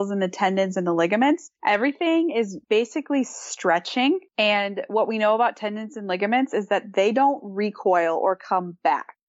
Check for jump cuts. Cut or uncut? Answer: cut